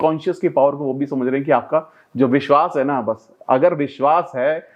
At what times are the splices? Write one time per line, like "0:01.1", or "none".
none